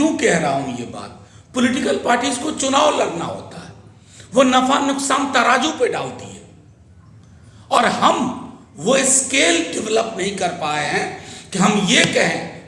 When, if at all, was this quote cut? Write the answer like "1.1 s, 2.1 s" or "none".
none